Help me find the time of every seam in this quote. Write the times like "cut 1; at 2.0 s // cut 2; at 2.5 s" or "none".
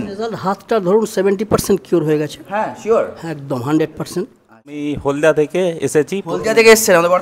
cut 1; at 4.8 s

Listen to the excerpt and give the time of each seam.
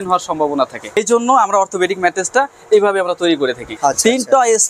cut 1; at 1.0 s // cut 2; at 3.7 s

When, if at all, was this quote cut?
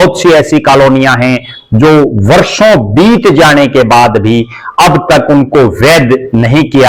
none

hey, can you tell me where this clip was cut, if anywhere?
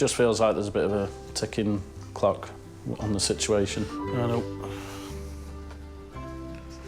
none

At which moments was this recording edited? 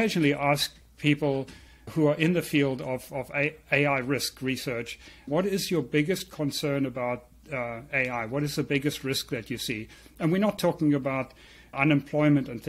cut 1; at 1.9 s // cut 2; at 5.3 s // cut 3; at 11.8 s

